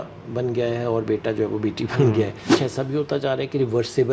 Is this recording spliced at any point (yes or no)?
yes